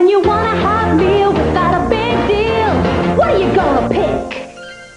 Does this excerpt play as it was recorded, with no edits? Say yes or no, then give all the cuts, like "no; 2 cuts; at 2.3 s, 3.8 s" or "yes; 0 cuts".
yes; 0 cuts